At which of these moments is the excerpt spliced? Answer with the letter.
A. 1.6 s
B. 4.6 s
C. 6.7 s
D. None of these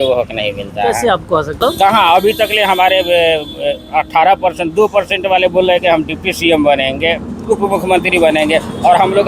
A